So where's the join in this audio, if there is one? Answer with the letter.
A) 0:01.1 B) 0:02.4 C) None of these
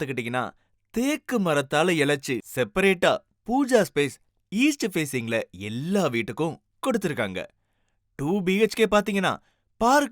B